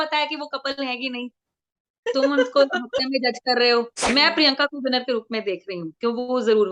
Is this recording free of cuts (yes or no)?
no